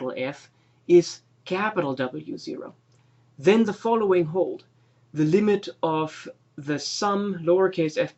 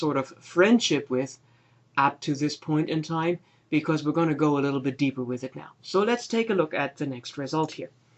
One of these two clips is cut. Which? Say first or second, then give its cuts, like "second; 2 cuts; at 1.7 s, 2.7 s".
first; 1 cut; at 4.6 s